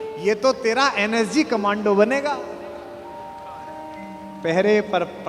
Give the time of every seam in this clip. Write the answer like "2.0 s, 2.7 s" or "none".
none

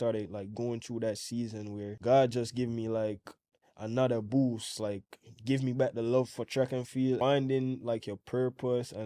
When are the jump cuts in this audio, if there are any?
1.9 s, 7.2 s

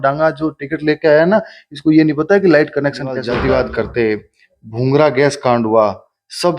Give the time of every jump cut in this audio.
3.3 s

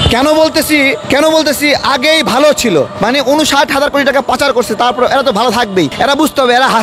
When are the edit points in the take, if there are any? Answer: 1.0 s, 2.9 s, 5.9 s

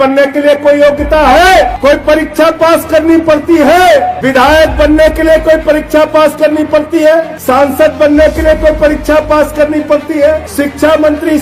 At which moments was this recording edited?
1.7 s, 4.2 s, 7.4 s, 10.5 s

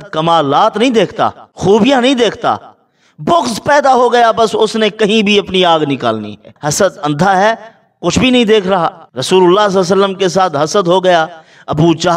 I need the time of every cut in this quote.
1.5 s, 6.5 s, 9.1 s

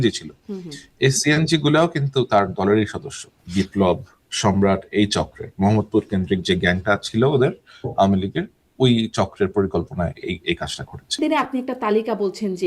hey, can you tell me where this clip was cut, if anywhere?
3.3 s, 11.2 s

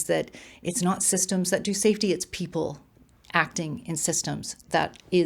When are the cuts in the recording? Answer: none

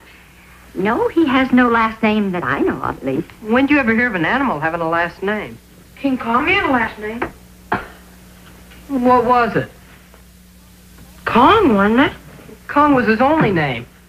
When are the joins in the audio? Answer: none

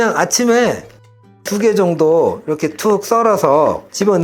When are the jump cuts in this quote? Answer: 1.1 s

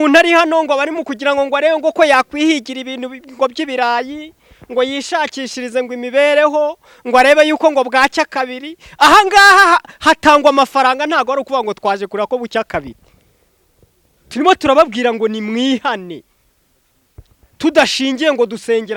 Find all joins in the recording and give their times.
none

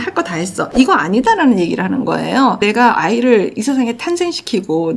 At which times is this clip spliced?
2.6 s

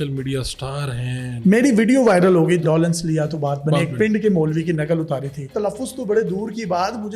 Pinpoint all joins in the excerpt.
1.3 s, 2.6 s, 5.5 s

